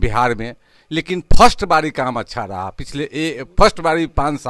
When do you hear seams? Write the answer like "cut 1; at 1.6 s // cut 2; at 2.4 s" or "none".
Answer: none

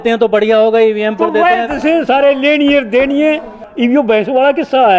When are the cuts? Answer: cut 1; at 3.6 s

